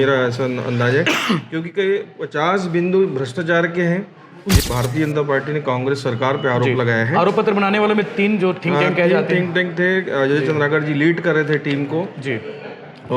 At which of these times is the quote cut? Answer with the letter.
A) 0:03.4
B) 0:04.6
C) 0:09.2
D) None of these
B